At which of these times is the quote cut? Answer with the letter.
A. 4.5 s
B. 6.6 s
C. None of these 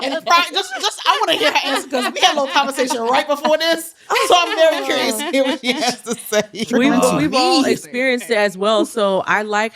B